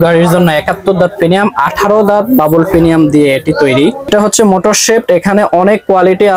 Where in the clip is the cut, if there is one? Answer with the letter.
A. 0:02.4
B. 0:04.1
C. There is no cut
B